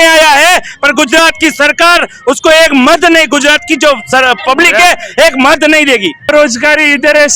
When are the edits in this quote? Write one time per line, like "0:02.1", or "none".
0:06.3